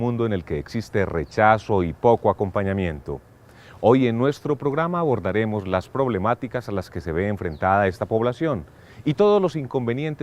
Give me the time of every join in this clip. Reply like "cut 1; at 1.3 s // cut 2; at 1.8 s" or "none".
cut 1; at 1.4 s